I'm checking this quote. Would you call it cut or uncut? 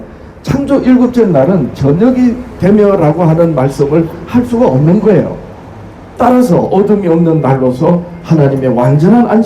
cut